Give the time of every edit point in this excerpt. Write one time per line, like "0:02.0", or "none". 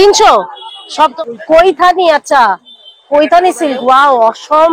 0:01.1